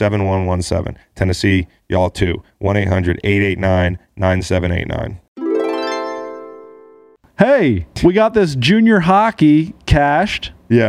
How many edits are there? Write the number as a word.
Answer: two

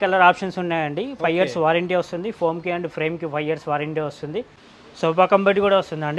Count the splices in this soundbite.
one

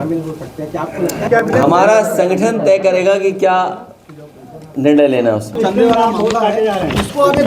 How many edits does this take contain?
two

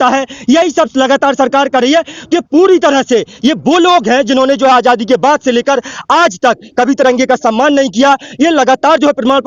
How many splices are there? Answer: zero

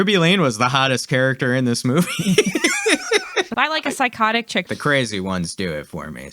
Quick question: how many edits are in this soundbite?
two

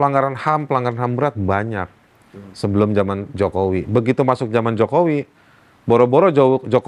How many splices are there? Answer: zero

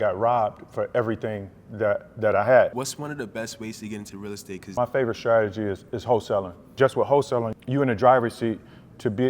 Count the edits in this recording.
four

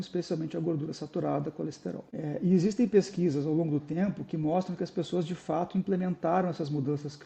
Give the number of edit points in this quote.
one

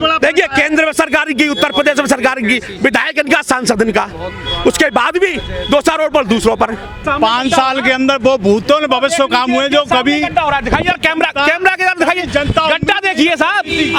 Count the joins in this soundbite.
one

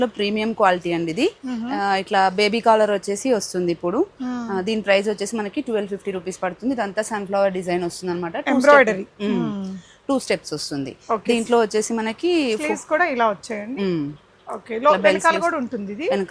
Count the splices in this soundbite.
zero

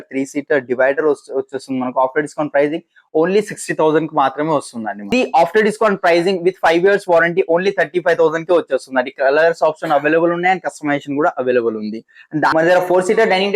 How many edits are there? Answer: two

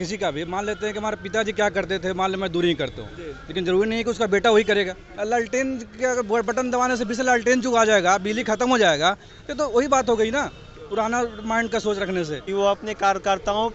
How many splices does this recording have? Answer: two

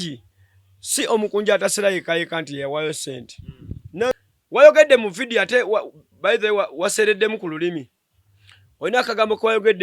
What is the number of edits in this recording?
one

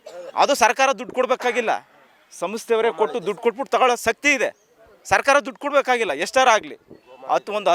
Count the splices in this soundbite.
zero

